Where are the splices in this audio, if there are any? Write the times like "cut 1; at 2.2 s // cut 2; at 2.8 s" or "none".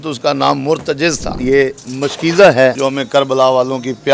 cut 1; at 1.3 s // cut 2; at 2.8 s